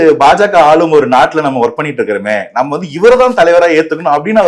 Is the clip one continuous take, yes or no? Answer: yes